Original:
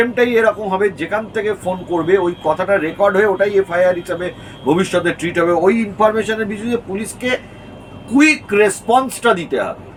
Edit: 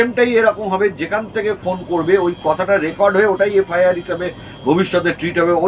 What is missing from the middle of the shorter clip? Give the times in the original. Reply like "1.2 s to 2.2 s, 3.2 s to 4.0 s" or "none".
none